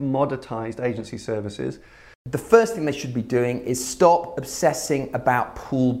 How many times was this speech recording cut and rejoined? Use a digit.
1